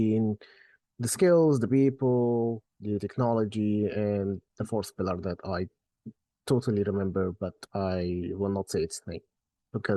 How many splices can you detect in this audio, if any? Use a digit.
0